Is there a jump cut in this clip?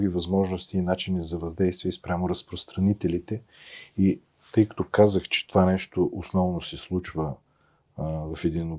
no; 0 cuts

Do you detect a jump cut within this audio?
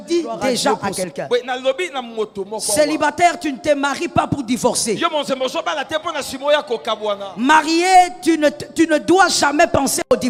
no; 0 cuts

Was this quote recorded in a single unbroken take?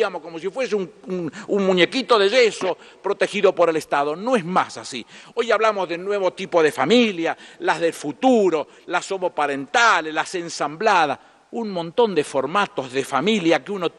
yes; 0 cuts

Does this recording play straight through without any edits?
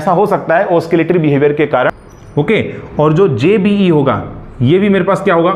no; 1 cut; at 2.1 s

